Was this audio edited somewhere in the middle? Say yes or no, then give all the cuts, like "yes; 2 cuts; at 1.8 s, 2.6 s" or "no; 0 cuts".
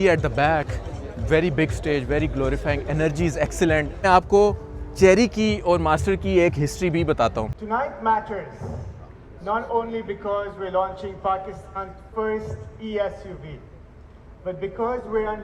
yes; 2 cuts; at 4.0 s, 7.6 s